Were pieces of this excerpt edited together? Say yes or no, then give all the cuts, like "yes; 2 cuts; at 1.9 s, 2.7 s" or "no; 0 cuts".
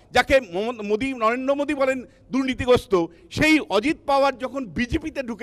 no; 0 cuts